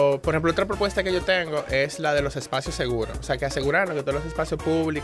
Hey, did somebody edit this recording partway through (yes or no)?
no